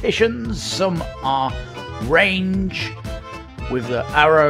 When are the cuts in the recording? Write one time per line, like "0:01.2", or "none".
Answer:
none